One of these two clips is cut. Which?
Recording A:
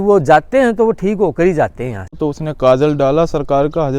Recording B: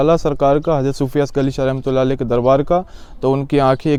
A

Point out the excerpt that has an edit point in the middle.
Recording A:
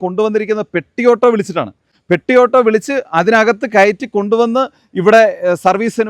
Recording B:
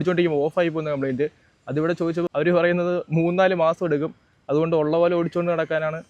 B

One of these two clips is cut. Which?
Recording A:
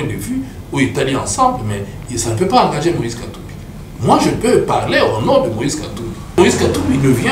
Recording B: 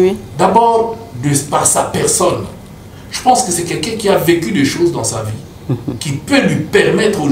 A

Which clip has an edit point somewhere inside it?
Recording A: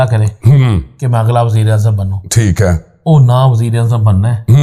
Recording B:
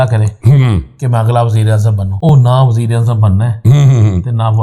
B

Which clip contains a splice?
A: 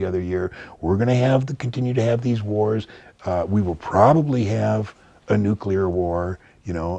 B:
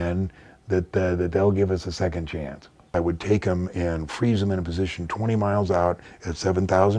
B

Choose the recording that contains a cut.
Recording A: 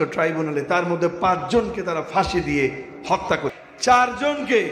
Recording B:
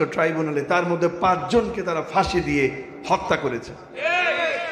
A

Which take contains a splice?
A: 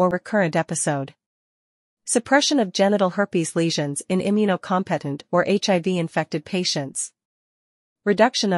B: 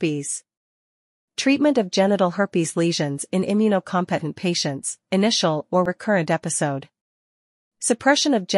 A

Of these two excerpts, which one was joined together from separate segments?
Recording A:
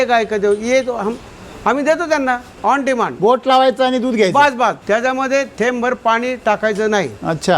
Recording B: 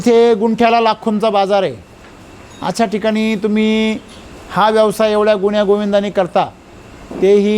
A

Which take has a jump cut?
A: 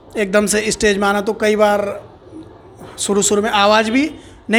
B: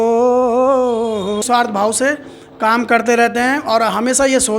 B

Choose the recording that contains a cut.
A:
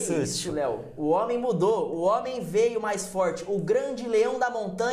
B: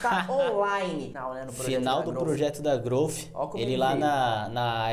B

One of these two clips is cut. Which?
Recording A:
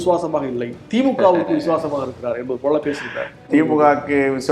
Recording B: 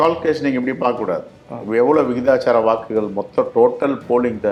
A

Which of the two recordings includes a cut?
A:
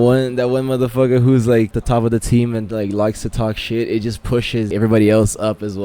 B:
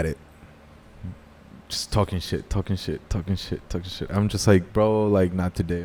A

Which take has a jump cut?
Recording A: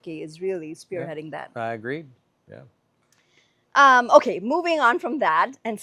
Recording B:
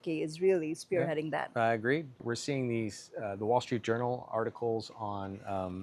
B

